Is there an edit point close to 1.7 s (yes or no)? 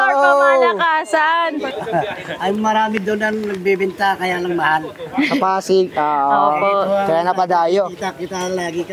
yes